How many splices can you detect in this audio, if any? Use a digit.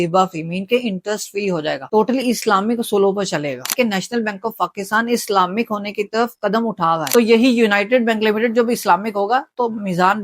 2